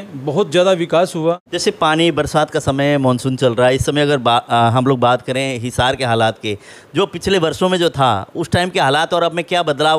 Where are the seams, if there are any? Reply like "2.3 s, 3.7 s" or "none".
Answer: 1.5 s